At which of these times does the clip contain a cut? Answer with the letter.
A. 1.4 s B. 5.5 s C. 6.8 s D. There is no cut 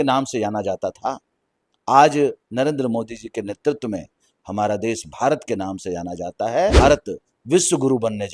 C